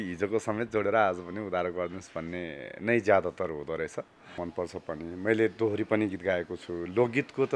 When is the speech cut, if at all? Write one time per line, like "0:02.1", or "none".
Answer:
0:04.4